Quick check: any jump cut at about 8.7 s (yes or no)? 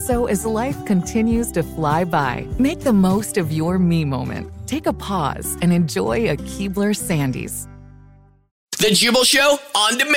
yes